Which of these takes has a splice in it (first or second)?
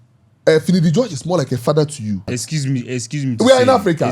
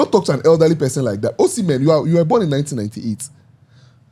first